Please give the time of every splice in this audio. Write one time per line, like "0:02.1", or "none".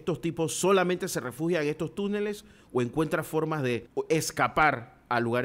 0:03.9